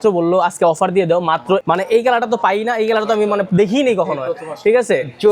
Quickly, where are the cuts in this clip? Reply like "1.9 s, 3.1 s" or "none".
1.6 s